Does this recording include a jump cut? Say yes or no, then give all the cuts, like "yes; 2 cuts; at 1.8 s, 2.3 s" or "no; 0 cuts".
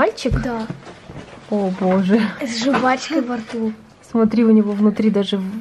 no; 0 cuts